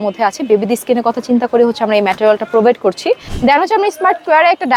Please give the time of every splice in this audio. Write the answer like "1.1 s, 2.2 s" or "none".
3.3 s